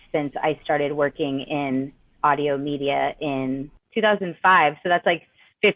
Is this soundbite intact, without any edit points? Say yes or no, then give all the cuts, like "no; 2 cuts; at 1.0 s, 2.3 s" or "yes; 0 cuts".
no; 1 cut; at 3.8 s